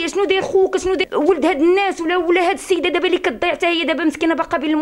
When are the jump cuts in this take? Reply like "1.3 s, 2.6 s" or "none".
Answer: 1.0 s